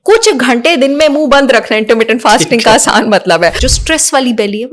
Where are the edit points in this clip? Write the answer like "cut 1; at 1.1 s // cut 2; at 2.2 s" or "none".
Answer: cut 1; at 3.6 s